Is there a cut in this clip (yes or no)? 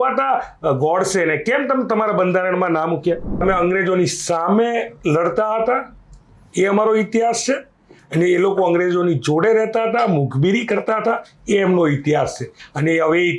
yes